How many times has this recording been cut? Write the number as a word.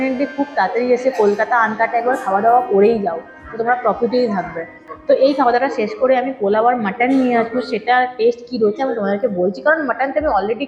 zero